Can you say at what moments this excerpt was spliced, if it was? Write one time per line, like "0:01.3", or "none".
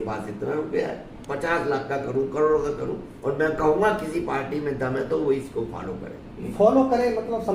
0:01.1
0:03.1
0:06.5